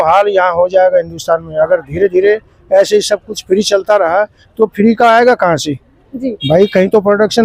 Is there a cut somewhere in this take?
no; 0 cuts

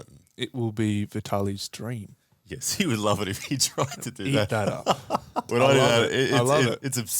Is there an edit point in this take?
yes; 1 cut; at 5.4 s

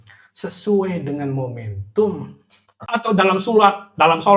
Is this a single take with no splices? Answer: no; 1 cut; at 2.7 s

